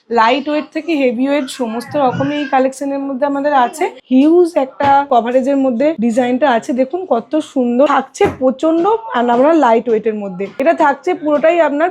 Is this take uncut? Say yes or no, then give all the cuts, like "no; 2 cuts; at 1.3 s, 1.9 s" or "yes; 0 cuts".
no; 5 cuts; at 4.0 s, 5.1 s, 6.0 s, 7.9 s, 10.4 s